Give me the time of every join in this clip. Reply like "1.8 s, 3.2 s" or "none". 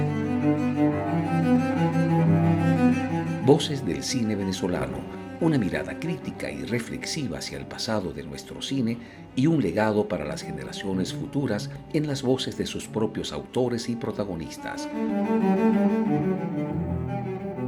none